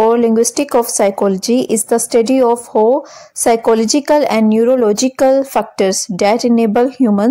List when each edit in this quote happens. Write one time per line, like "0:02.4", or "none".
none